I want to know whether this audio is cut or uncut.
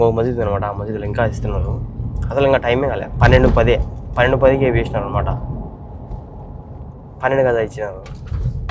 uncut